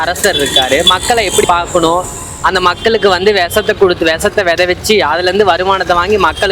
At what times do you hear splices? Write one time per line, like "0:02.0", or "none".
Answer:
0:01.4